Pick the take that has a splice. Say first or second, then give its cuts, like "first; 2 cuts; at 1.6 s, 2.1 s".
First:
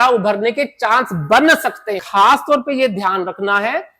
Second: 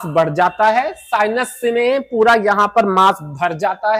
first; 1 cut; at 2.0 s